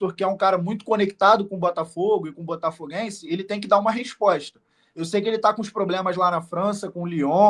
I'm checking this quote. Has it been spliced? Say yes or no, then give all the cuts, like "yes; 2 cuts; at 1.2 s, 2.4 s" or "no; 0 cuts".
no; 0 cuts